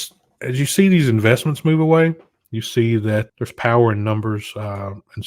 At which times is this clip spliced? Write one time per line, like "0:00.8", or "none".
0:03.3